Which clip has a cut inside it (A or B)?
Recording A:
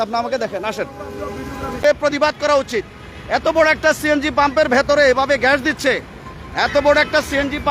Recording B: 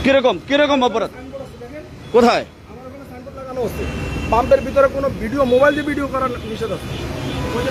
A